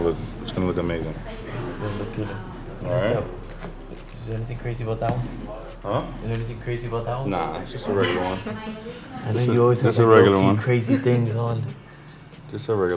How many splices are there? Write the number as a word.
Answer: zero